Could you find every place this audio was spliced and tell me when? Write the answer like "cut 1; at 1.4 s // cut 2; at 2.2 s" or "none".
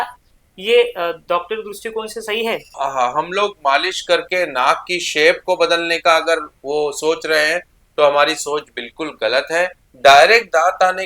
cut 1; at 2.7 s // cut 2; at 9.8 s